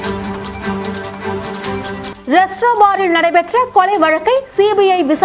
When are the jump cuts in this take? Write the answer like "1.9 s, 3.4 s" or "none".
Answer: 2.1 s